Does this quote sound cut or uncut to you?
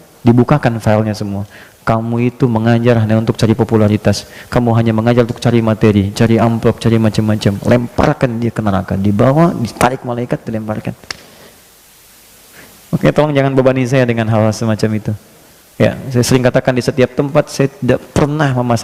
uncut